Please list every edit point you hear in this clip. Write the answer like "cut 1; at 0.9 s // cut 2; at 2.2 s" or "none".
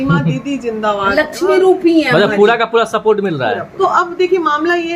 cut 1; at 3.7 s